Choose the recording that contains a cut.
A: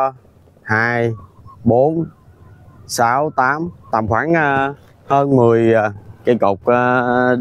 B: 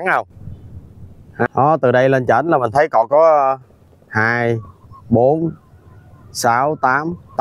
B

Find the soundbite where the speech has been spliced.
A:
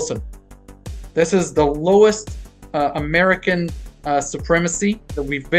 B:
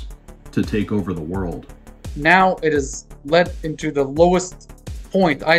B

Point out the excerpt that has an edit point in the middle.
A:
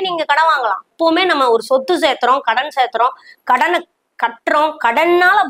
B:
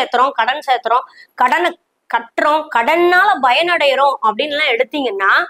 A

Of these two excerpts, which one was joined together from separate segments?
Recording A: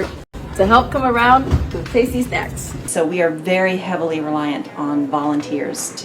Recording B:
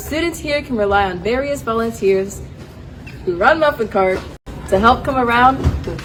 A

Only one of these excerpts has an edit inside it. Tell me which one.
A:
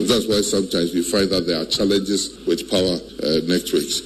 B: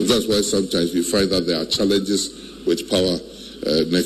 A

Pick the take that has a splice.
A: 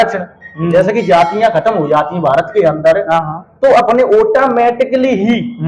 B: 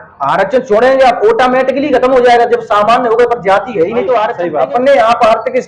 B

